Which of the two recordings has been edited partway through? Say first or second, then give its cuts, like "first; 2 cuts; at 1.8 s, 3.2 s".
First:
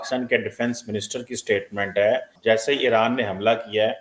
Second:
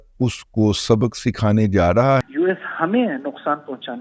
second; 1 cut; at 2.2 s